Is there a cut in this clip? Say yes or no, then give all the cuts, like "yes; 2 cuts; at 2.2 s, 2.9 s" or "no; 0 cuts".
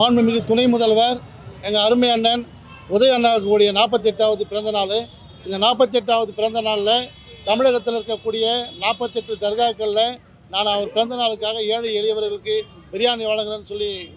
no; 0 cuts